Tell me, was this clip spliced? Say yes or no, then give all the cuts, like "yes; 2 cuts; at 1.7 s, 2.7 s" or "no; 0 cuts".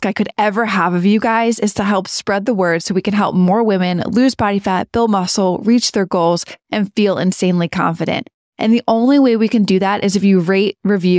no; 0 cuts